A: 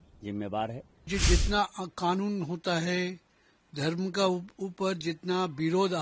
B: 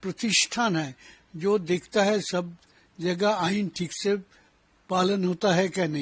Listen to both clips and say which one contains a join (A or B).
A